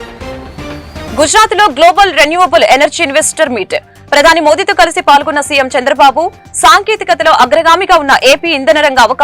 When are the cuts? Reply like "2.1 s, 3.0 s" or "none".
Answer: 1.1 s